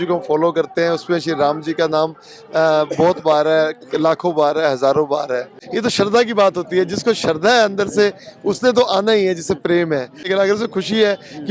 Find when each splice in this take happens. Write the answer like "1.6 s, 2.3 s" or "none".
5.5 s, 10.2 s